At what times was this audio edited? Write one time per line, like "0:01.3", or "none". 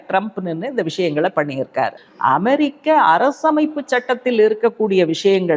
0:01.9